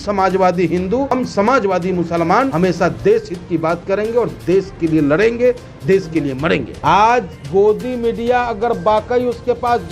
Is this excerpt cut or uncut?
cut